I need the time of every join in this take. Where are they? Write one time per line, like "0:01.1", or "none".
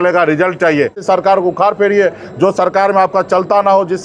0:01.0